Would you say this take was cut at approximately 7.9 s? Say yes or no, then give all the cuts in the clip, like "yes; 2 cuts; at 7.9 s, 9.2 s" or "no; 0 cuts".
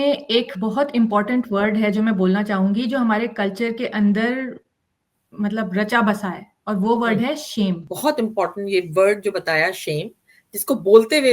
yes; 1 cut; at 7.9 s